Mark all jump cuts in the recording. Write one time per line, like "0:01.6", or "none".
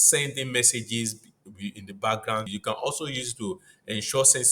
0:02.5